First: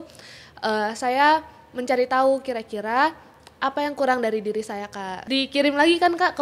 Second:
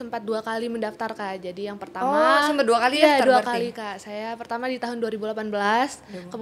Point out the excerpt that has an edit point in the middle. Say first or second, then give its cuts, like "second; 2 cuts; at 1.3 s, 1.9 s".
first; 1 cut; at 5.1 s